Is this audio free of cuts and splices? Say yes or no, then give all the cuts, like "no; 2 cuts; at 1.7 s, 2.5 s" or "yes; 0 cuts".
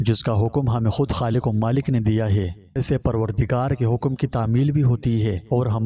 no; 1 cut; at 2.8 s